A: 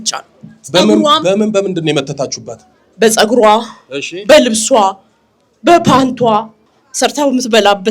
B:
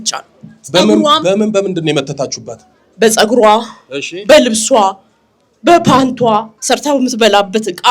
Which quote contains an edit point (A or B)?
B